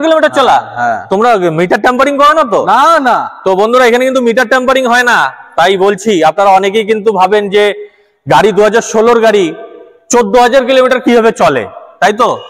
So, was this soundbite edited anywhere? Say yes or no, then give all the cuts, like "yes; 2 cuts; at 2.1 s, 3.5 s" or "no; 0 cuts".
no; 0 cuts